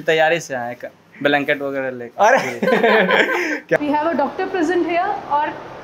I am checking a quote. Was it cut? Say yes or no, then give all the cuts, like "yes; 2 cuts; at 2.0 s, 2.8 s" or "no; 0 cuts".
yes; 1 cut; at 3.8 s